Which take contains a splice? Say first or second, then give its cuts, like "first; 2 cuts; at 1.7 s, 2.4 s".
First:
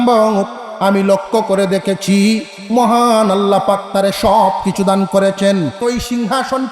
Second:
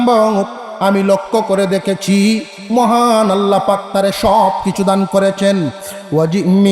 first; 1 cut; at 5.8 s